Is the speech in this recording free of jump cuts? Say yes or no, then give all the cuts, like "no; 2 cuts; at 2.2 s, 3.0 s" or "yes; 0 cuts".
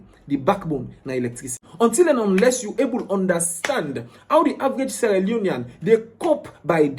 no; 1 cut; at 1.6 s